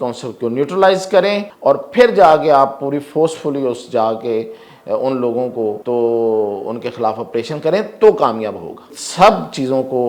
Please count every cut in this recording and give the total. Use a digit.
3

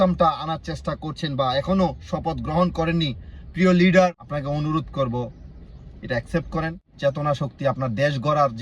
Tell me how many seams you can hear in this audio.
2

